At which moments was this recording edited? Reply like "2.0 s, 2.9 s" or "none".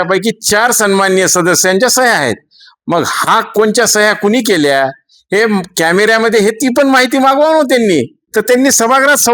8.2 s